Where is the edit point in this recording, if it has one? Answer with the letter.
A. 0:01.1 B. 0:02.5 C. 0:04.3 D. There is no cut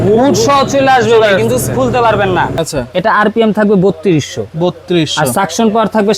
B